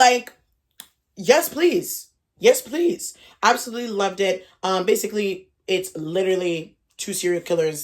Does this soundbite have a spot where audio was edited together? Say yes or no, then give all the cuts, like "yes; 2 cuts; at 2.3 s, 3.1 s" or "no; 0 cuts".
no; 0 cuts